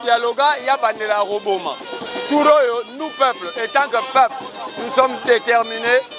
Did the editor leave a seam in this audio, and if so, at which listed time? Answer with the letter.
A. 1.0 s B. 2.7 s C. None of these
C